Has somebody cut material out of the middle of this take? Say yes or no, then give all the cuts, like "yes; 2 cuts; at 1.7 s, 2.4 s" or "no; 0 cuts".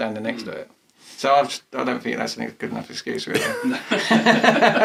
no; 0 cuts